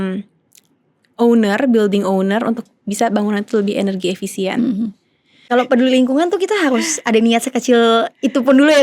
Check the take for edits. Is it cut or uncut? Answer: cut